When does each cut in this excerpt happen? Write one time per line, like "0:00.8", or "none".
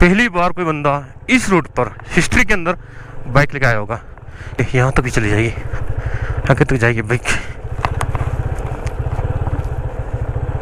0:04.6